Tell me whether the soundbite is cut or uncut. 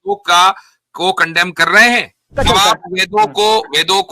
cut